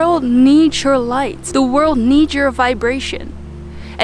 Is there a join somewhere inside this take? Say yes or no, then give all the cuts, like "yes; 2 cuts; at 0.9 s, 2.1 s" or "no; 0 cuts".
yes; 1 cut; at 1.4 s